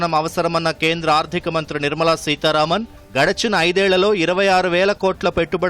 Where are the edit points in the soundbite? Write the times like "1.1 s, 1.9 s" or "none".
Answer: none